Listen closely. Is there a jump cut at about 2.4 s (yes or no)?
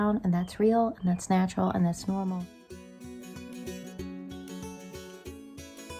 yes